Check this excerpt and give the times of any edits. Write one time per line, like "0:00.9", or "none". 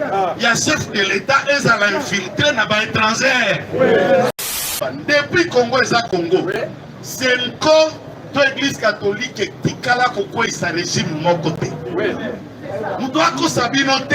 0:04.3